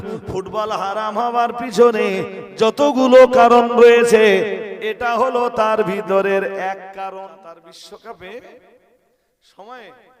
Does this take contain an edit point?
yes; 1 cut; at 7.1 s

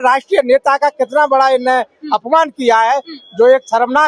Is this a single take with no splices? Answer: yes; 0 cuts

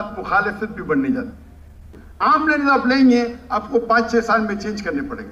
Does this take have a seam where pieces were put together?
yes; 1 cut; at 2.3 s

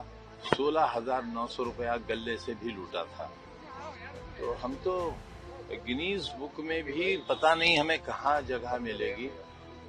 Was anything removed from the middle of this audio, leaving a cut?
no; 0 cuts

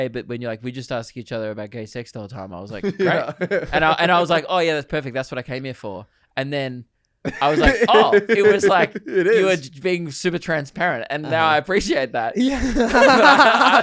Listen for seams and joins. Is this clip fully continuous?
yes; 0 cuts

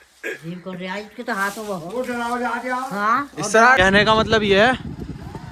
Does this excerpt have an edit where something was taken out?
yes; 1 cut; at 3.8 s

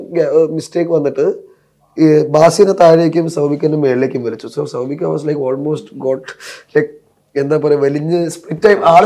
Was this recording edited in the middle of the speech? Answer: no; 0 cuts

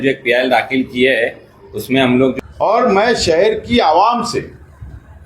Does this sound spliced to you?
yes; 1 cut; at 2.3 s

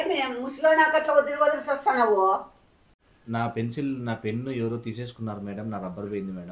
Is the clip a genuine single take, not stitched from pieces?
no; 1 cut; at 2.5 s

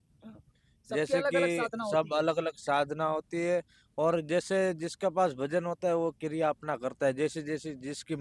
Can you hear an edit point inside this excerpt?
no; 0 cuts

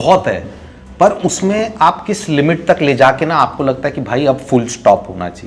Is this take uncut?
yes; 0 cuts

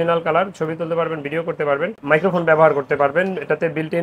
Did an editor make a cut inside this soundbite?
no; 0 cuts

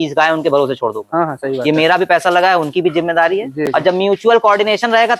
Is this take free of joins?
yes; 0 cuts

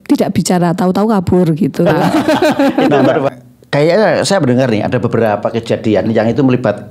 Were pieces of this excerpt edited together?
yes; 1 cut; at 3.3 s

